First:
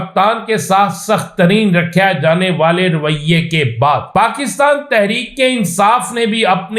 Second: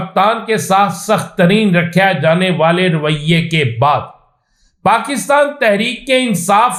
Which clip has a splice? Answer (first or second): first